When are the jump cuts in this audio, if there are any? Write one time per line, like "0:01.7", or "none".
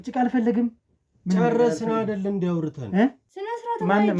0:03.3